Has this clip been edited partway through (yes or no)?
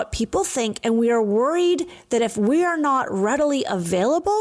no